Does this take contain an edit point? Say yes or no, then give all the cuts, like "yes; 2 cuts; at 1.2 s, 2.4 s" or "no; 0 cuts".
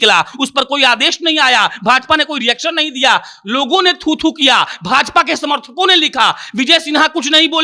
no; 0 cuts